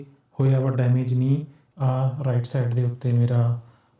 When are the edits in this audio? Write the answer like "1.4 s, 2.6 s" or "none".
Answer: 1.6 s